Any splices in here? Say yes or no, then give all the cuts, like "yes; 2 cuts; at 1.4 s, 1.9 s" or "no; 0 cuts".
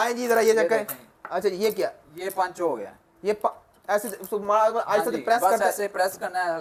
no; 0 cuts